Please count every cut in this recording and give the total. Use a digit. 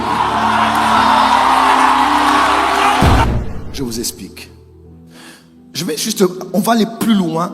1